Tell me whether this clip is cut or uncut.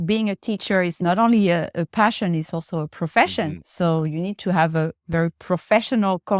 cut